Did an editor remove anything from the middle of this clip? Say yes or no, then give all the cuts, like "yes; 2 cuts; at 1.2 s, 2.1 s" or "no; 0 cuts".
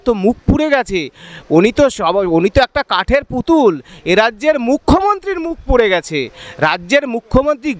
no; 0 cuts